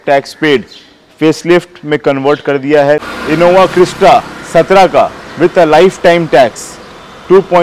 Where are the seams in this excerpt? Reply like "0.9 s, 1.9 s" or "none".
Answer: 3.1 s